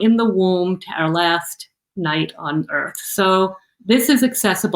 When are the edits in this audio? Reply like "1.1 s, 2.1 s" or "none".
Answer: 3.7 s